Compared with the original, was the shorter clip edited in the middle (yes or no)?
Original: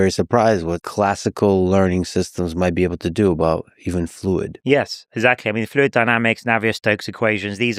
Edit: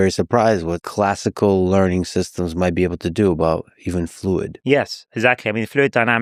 no